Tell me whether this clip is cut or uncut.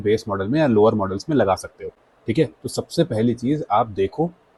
uncut